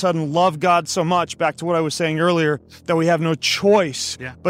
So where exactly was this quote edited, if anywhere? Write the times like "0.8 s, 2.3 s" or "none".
none